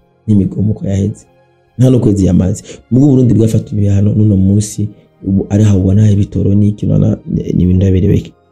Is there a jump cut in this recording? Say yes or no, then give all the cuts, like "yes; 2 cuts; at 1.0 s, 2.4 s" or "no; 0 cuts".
no; 0 cuts